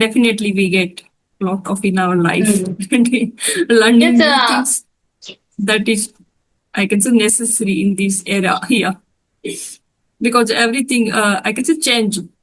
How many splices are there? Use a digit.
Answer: 0